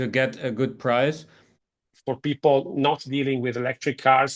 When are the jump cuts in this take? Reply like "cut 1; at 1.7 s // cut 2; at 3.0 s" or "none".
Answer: cut 1; at 1.7 s